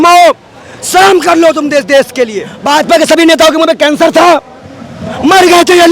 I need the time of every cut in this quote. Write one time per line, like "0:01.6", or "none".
0:02.5